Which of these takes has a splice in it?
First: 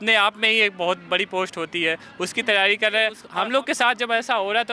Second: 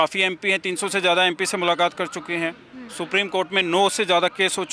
first; 1 cut; at 3.2 s

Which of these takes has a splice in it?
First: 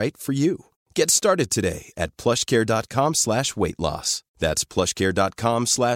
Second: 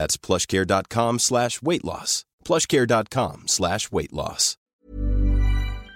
second; 1 cut; at 4.7 s

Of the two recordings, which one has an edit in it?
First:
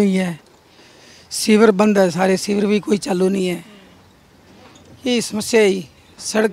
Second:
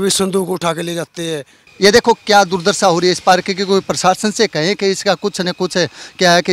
second; 1 cut; at 1.6 s

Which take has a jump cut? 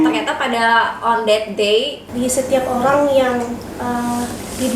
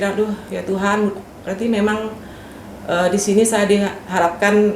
first; 1 cut; at 2.1 s

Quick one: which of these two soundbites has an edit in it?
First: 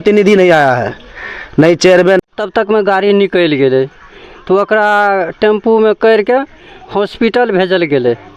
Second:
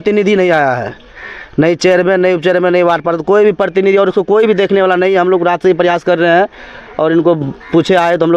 first; 1 cut; at 2.2 s

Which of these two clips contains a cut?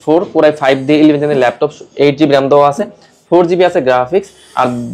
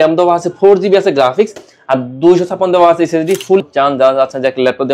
second; 1 cut; at 3.6 s

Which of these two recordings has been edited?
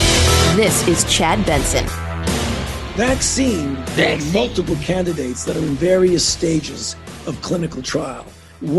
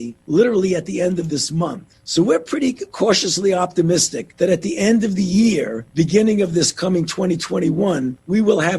first; 1 cut; at 2.8 s

